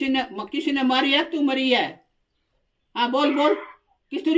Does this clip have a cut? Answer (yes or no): no